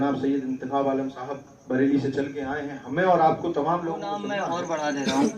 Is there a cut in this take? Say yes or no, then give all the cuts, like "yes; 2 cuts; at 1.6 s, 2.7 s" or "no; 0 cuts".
yes; 1 cut; at 4.5 s